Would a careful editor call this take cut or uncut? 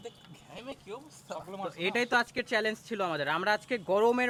uncut